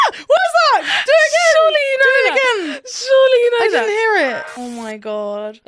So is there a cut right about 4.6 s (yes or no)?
yes